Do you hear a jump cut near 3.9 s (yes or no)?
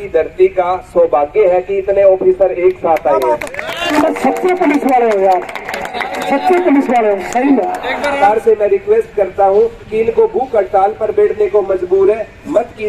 yes